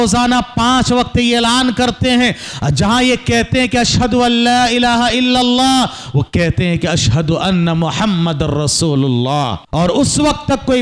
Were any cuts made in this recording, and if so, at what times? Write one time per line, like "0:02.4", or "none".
0:09.6